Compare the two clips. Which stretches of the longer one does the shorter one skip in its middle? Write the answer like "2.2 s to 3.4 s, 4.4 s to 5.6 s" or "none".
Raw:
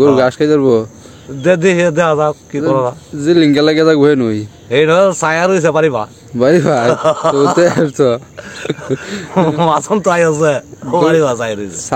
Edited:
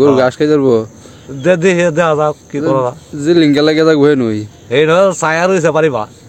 none